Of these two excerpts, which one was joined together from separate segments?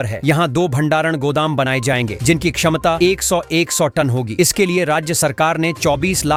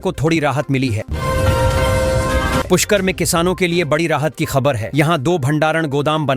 second; 2 cuts; at 1.1 s, 2.7 s

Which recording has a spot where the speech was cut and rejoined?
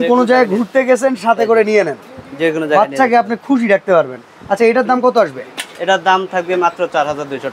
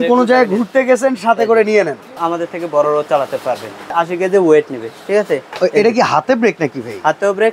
second; 2 cuts; at 2.2 s, 3.9 s

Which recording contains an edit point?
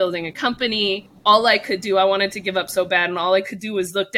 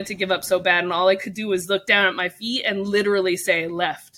first; 1 cut; at 1.1 s

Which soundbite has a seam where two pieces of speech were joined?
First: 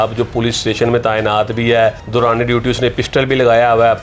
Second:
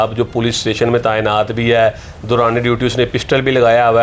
first; 1 cut; at 2.0 s

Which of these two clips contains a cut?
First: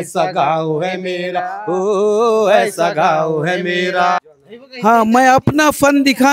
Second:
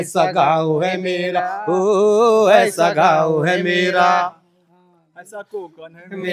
first; 1 cut; at 4.2 s

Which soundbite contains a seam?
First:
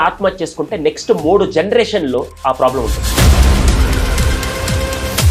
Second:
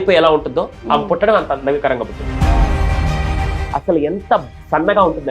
second; 1 cut; at 3.6 s

